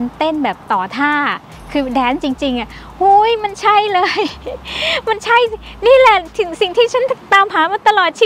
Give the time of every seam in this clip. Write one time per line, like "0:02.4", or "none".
none

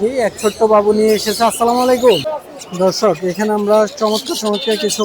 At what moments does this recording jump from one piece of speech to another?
0:02.3

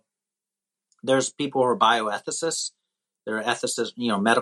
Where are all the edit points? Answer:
none

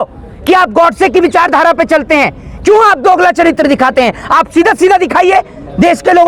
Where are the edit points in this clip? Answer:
none

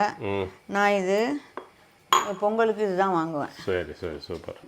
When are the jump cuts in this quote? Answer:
none

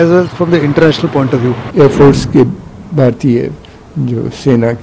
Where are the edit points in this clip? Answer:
0:01.7

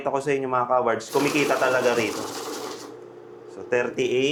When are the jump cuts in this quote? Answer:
none

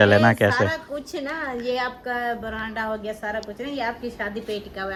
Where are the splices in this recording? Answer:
none

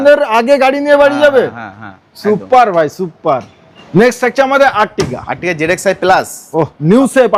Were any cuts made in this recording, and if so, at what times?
none

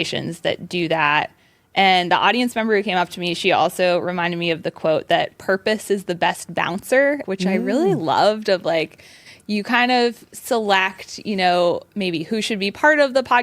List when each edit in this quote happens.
0:07.2

